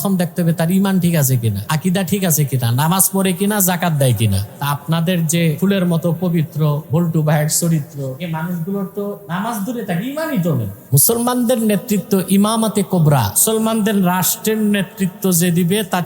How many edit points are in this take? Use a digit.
8